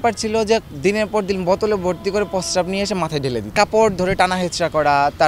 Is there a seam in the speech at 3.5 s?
yes; 1 cut; at 3.5 s

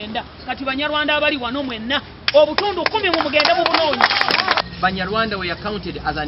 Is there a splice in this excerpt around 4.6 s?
yes; 1 cut; at 4.6 s

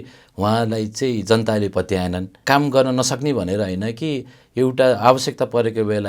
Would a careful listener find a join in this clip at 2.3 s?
yes; 1 cut; at 2.3 s

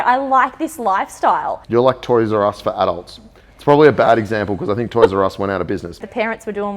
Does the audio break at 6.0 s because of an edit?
yes; 2 cuts; at 1.6 s, 6.0 s

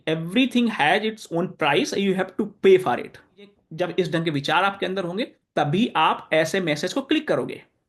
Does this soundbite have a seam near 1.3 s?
no; 1 cut; at 3.6 s

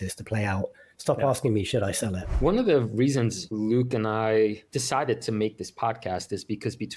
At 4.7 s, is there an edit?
yes; 3 cuts; at 2.3 s, 3.4 s, 4.7 s

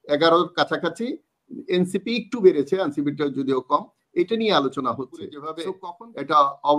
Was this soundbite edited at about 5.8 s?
yes; 1 cut; at 5.8 s

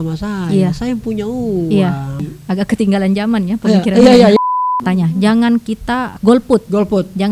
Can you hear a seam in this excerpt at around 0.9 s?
no; 3 cuts; at 2.2 s, 4.6 s, 6.1 s

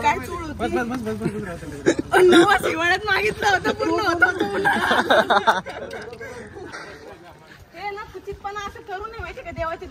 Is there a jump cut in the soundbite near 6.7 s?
yes; 1 cut; at 6.7 s

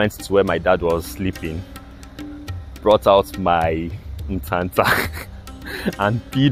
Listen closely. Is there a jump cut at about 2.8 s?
no; 0 cuts

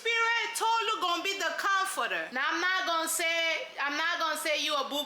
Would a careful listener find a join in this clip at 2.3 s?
yes; 1 cut; at 2.3 s

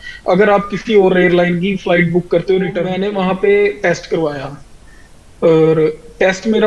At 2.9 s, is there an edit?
yes; 1 cut; at 2.9 s

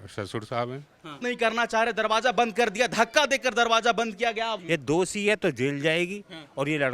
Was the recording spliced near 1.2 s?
yes; 2 cuts; at 1.2 s, 4.6 s

